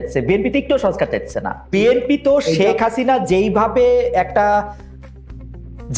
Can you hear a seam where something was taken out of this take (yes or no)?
yes